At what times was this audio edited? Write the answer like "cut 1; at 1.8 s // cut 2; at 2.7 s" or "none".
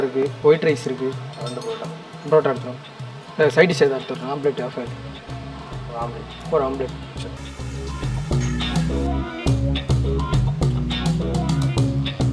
none